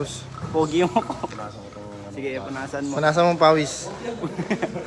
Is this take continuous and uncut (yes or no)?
yes